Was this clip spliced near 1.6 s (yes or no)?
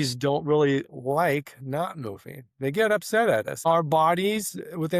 no